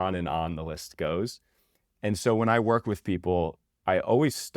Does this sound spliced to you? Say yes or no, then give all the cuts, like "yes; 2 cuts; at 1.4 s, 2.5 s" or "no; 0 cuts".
yes; 1 cut; at 3.7 s